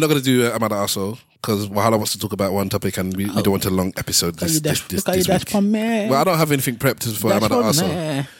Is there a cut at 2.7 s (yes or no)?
no